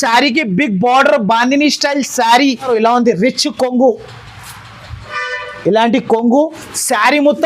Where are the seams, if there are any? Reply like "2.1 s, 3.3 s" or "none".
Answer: 2.7 s